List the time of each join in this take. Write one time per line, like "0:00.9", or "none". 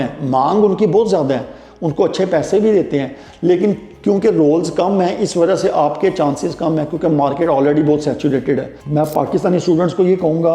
0:08.8